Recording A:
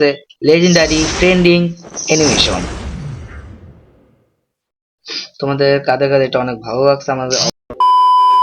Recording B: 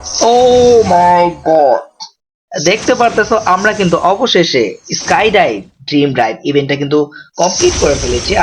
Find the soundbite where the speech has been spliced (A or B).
A